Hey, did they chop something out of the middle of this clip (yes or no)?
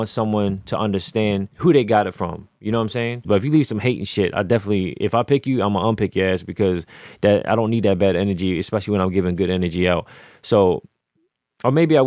yes